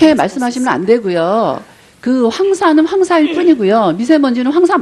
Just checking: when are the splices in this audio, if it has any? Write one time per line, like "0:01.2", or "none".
0:03.3